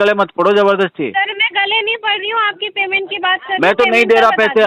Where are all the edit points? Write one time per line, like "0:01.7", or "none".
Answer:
none